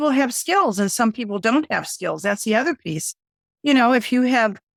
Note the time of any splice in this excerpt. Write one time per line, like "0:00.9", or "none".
none